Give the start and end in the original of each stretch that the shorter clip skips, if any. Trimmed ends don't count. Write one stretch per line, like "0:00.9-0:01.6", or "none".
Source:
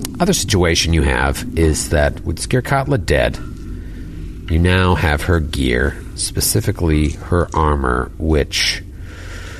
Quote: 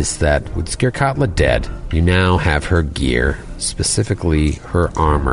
0:03.5-0:04.3

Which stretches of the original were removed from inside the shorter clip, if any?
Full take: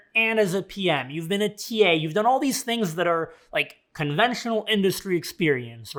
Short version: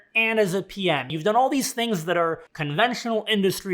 0:01.1-0:02.1
0:03.4-0:03.9

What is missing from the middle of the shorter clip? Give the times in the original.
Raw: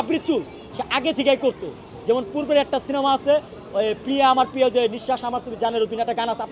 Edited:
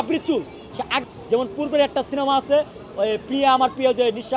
0:01.0-0:01.8

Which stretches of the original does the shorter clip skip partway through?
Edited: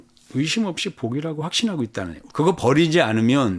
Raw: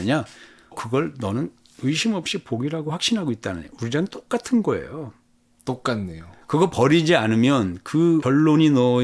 0:03.7-0:06.3

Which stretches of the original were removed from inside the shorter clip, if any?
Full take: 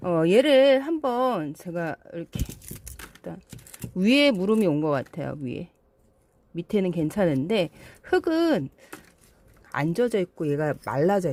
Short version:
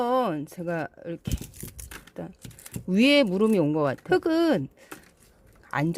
0:05.1-0:08.0

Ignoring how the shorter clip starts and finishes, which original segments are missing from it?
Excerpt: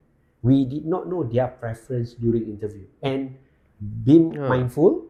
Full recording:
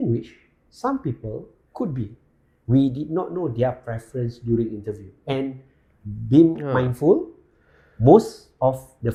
none

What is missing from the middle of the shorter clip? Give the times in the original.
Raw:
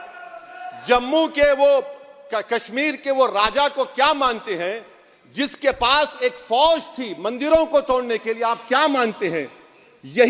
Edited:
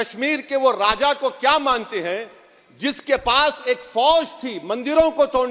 none

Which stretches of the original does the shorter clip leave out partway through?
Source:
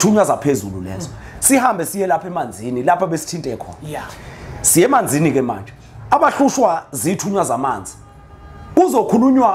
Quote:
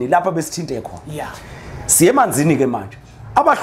none

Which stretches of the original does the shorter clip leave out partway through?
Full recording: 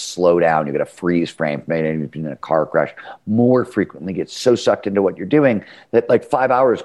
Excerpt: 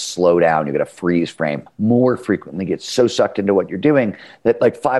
0:01.6-0:03.1

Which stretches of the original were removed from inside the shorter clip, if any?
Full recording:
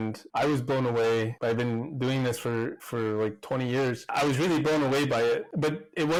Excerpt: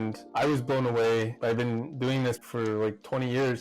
0:02.4-0:02.8

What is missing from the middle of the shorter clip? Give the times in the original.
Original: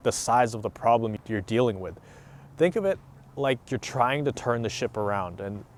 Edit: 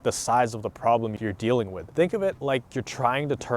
0:01.2-0:01.9
0:03.0-0:03.3

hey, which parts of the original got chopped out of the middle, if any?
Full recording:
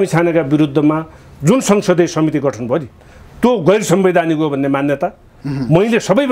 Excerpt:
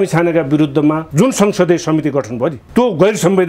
0:01.0-0:01.3
0:02.9-0:03.3

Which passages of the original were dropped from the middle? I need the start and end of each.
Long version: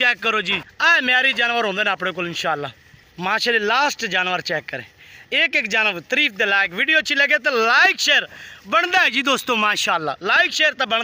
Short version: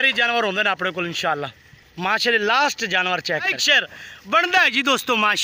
0:04.8-0:08.0

